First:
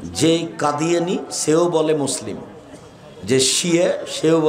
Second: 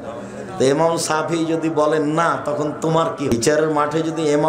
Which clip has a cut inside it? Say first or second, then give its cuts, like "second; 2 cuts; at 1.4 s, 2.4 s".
second; 1 cut; at 3.3 s